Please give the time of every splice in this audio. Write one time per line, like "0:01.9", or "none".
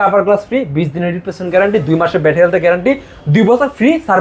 none